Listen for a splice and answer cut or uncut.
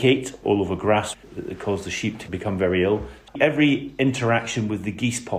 cut